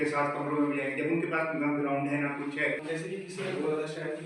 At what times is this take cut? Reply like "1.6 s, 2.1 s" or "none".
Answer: 2.8 s